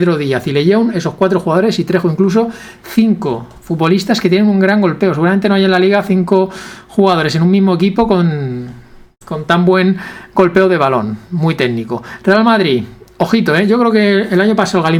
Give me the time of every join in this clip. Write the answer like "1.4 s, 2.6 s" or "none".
none